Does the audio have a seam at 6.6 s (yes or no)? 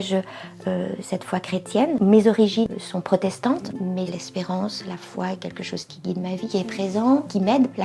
no